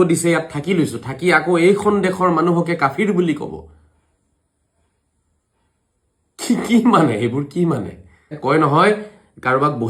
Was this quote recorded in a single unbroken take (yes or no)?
no